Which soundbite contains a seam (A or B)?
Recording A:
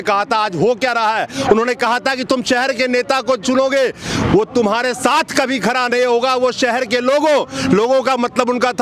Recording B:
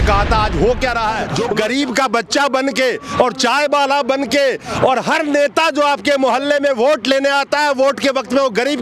B